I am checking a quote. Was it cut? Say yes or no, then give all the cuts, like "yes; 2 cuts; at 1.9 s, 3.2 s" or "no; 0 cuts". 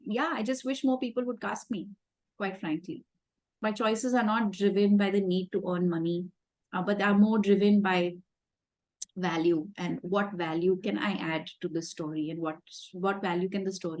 yes; 1 cut; at 3.5 s